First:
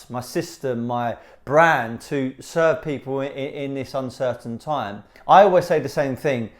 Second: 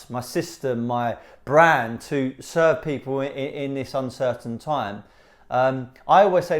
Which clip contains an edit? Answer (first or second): first